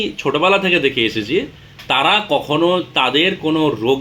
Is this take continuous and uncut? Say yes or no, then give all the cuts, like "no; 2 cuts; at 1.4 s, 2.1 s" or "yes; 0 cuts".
yes; 0 cuts